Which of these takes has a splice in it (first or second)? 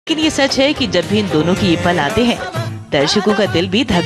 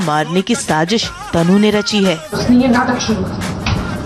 first